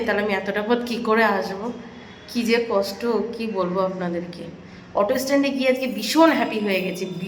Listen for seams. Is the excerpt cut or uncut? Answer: uncut